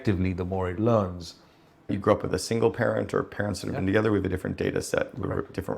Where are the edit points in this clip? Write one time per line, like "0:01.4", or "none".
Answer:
0:01.9